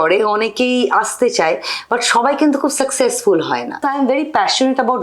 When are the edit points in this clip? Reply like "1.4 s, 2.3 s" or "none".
3.8 s